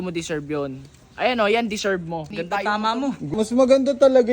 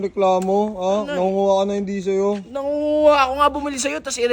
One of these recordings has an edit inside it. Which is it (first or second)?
first